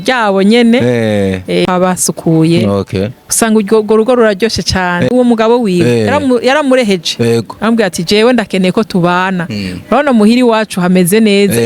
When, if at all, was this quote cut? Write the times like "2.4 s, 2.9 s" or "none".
1.6 s, 5.1 s